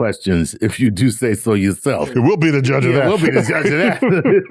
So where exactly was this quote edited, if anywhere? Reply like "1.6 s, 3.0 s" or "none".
2.1 s